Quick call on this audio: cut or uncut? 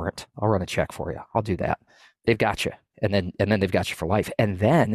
uncut